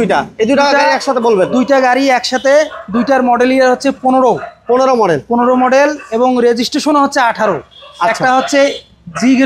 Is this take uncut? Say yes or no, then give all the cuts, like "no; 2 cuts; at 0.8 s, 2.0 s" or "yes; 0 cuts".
yes; 0 cuts